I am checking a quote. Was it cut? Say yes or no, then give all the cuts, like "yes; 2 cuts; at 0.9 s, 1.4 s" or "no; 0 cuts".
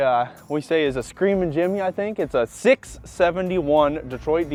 no; 0 cuts